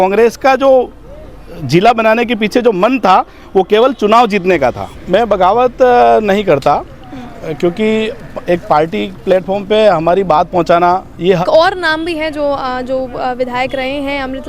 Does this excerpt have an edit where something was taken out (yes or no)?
yes